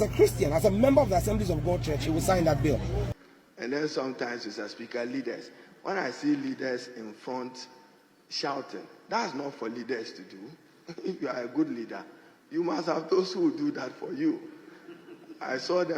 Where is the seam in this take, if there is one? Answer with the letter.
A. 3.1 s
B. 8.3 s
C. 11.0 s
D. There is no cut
A